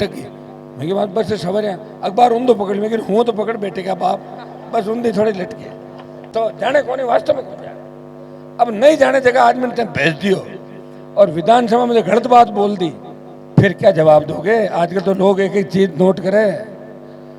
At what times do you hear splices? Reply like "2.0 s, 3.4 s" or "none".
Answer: none